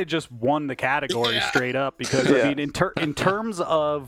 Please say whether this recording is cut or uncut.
uncut